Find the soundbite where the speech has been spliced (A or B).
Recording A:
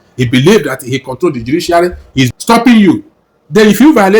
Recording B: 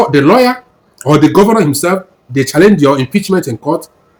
A